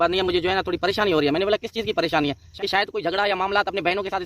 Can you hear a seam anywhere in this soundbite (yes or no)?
yes